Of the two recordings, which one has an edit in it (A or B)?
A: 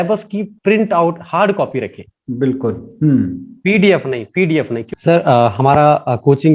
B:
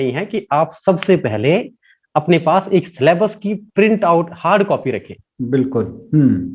A